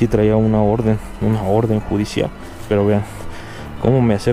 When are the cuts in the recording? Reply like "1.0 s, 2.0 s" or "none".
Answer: 2.5 s